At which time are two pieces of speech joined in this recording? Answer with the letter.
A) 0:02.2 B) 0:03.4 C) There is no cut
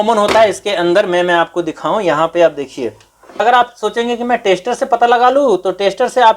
B